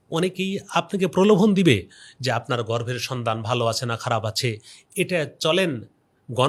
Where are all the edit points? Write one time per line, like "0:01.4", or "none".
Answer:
none